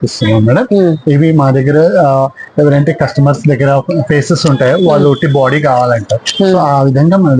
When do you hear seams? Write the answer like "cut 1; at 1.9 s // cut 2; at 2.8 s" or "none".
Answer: none